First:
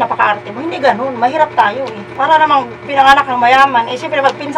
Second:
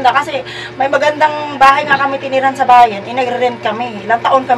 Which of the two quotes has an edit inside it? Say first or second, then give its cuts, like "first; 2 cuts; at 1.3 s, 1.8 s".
first; 1 cut; at 2.0 s